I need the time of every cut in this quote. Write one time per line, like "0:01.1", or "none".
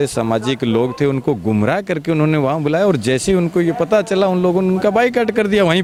none